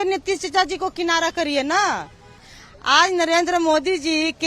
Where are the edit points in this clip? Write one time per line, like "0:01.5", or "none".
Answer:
0:02.4